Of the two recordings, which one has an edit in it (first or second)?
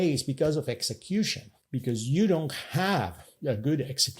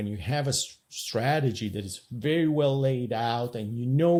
first